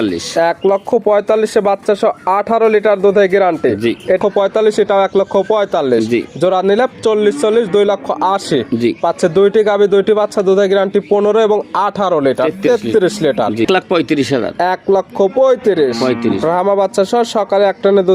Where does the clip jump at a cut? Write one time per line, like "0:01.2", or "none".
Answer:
0:04.2
0:13.7